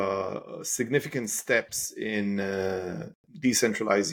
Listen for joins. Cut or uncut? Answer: uncut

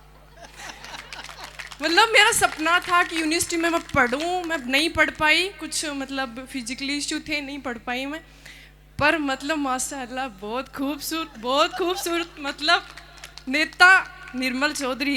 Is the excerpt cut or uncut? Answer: uncut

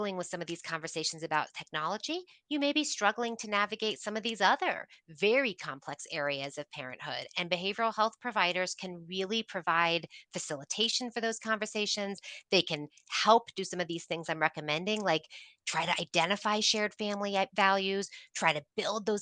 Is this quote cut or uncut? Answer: uncut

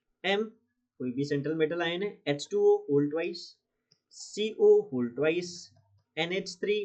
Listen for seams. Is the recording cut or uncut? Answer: uncut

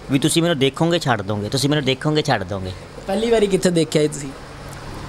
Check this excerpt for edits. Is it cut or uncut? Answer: uncut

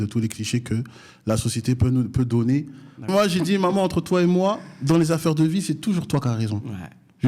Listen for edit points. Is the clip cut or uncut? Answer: cut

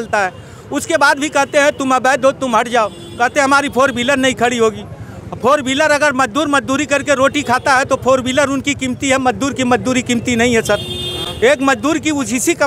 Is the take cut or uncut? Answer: uncut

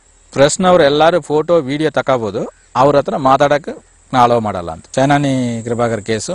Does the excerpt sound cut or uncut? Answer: cut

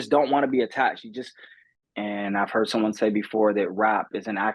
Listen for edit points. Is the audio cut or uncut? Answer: cut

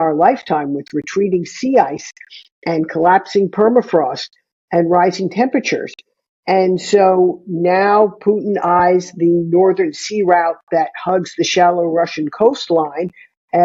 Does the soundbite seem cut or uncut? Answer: uncut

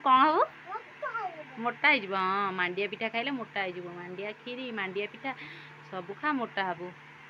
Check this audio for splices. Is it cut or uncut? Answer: uncut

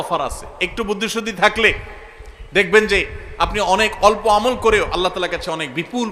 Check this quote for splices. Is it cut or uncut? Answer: uncut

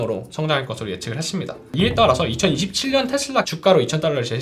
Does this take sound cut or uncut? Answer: cut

